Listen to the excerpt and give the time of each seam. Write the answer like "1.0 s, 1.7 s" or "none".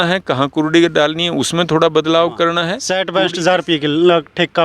2.8 s